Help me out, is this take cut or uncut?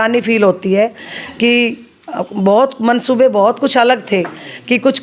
uncut